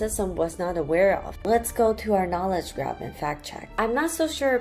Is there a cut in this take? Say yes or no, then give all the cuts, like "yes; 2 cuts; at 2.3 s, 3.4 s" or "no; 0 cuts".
yes; 2 cuts; at 1.3 s, 3.7 s